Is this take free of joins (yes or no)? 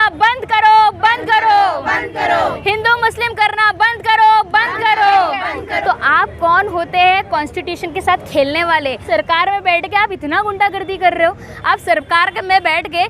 no